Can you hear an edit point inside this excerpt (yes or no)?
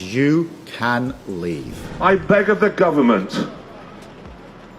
yes